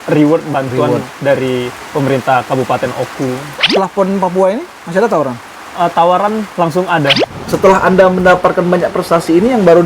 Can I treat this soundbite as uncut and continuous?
no; 2 cuts; at 3.6 s, 7.4 s

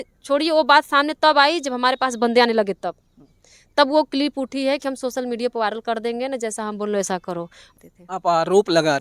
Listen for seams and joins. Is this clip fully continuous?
no; 1 cut; at 7.6 s

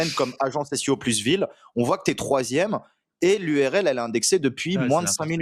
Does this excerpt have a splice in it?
no; 0 cuts

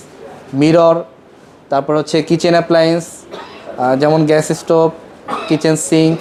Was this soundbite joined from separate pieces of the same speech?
no; 0 cuts

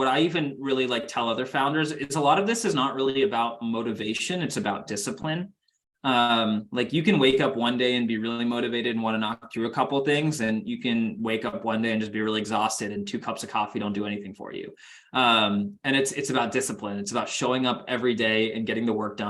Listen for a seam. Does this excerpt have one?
no; 0 cuts

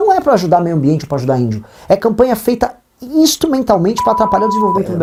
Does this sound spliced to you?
no; 0 cuts

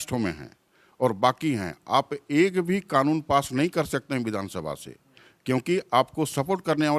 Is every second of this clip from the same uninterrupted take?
yes; 0 cuts

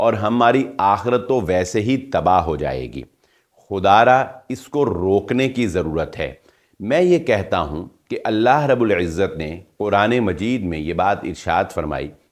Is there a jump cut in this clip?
no; 0 cuts

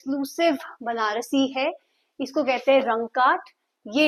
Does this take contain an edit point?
no; 0 cuts

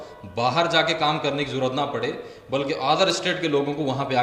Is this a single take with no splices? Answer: yes; 0 cuts

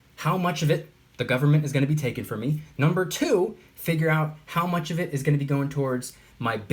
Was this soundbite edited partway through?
no; 0 cuts

